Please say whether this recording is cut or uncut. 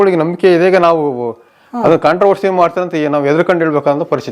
uncut